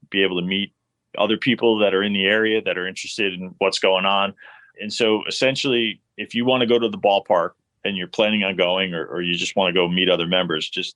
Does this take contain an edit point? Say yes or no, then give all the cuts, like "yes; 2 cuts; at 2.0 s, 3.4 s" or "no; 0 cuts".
yes; 2 cuts; at 3.5 s, 4.7 s